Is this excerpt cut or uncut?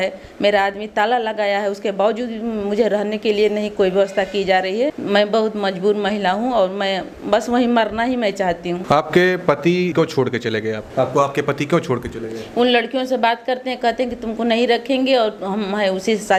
uncut